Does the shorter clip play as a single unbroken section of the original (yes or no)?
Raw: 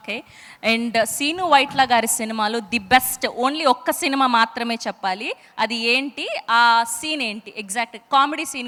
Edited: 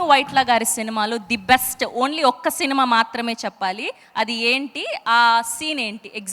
yes